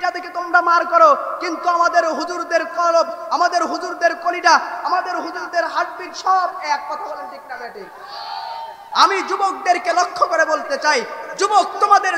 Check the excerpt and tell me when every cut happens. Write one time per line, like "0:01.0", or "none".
0:08.8

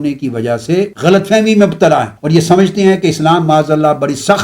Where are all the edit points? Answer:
0:00.9
0:02.1

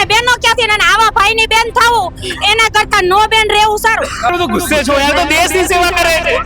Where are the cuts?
0:04.3

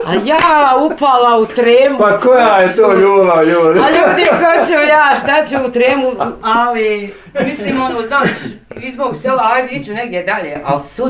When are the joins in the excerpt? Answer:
0:06.4

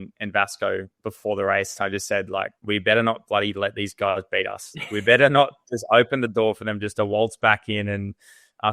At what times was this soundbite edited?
0:02.6

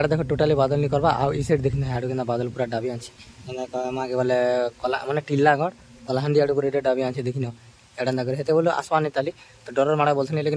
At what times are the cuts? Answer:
none

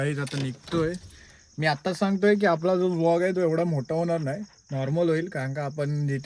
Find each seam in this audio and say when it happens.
none

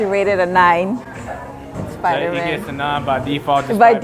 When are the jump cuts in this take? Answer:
none

